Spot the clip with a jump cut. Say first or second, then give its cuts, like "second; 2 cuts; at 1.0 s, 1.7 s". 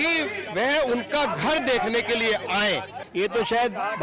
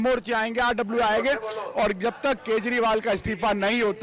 first; 1 cut; at 3.0 s